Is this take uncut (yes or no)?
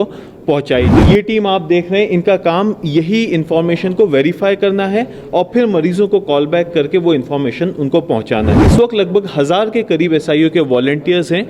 no